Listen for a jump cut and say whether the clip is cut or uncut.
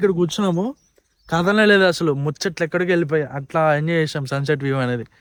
uncut